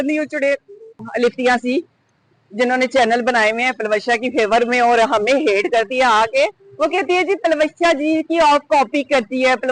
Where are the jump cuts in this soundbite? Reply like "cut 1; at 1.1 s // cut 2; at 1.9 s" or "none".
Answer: cut 1; at 1.0 s